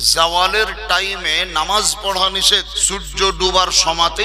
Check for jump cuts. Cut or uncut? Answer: cut